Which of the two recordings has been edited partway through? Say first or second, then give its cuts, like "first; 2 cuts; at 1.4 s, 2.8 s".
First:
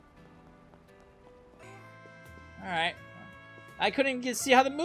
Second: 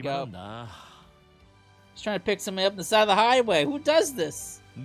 first; 1 cut; at 1.6 s